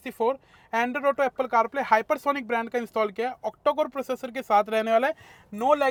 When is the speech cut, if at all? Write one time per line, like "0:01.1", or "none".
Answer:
none

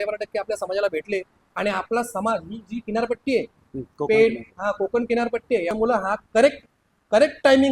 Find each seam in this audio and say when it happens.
0:05.7

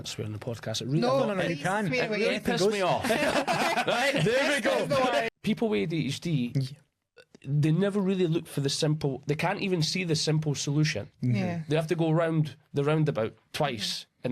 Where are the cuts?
0:05.3

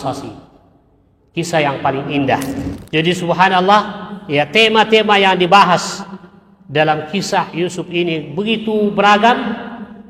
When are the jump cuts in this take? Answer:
0:02.8

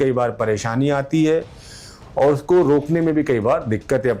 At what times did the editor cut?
none

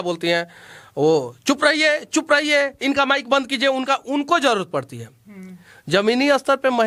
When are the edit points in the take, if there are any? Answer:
none

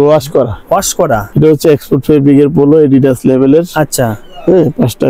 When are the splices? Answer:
0:01.3

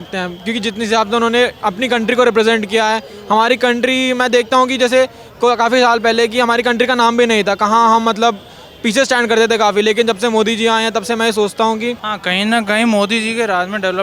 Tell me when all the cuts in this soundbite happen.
0:12.1

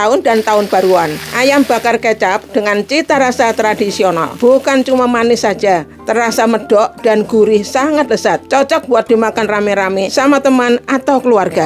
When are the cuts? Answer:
0:01.2
0:04.3
0:08.4
0:10.1

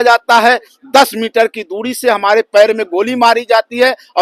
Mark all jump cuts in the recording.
none

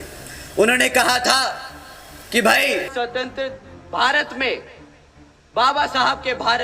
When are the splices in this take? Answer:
0:02.9

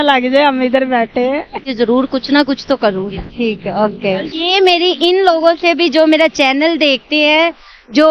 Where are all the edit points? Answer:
0:01.7

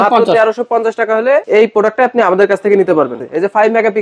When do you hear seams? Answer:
0:01.4
0:03.2

